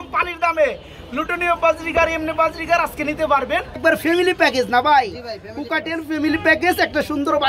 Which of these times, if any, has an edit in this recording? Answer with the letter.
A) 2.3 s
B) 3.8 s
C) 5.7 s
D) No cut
B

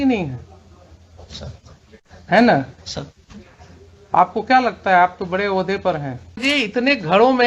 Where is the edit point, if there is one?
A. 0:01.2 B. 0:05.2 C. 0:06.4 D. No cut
C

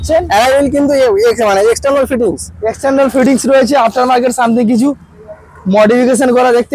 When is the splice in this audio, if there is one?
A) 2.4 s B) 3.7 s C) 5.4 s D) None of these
D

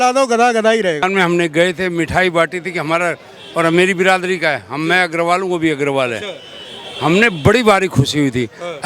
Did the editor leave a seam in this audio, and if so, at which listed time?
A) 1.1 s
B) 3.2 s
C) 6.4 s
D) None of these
A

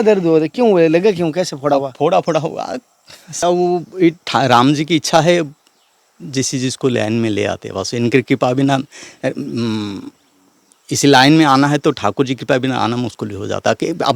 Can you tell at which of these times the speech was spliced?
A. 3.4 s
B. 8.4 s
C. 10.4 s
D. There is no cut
A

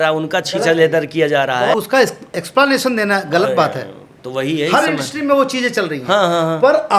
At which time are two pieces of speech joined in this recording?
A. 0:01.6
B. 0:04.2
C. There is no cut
A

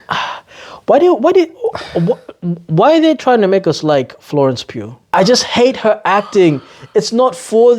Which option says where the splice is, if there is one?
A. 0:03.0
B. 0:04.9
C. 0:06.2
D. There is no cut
B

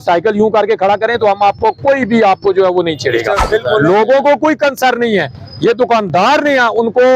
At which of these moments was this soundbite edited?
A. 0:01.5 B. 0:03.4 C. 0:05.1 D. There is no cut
B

